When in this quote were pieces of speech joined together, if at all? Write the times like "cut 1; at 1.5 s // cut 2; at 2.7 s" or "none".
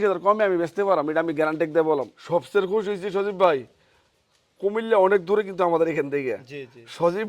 cut 1; at 2.2 s